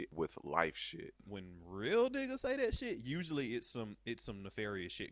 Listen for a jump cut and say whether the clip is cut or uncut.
cut